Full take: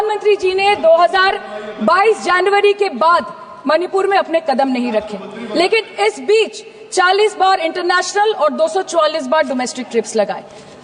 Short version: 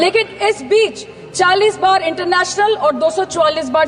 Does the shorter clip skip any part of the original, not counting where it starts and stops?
no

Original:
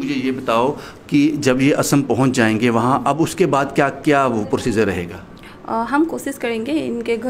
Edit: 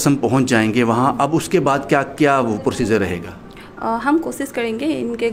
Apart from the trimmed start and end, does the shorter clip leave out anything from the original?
no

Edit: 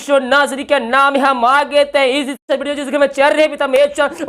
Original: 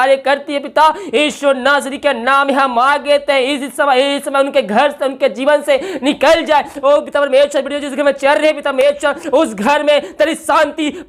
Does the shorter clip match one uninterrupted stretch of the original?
no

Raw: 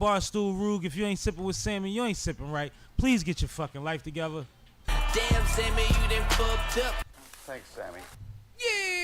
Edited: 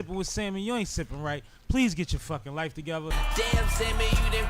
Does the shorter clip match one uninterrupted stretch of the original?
no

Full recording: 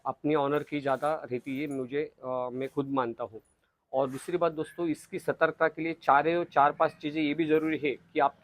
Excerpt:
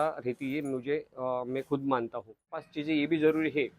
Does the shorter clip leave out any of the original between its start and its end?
yes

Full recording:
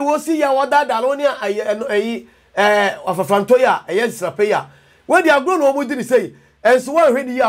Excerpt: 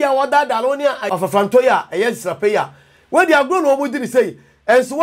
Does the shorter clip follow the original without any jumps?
no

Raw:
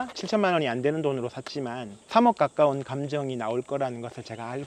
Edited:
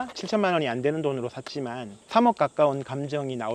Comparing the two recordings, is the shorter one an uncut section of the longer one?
yes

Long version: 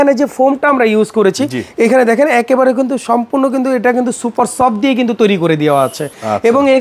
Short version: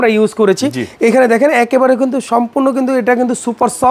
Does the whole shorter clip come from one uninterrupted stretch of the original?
yes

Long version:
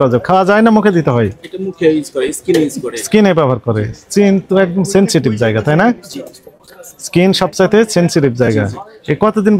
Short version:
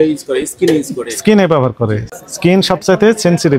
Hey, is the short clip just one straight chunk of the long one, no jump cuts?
no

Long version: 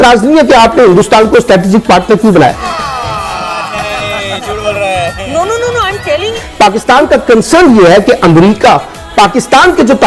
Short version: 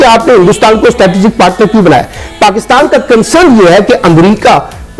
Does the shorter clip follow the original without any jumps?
no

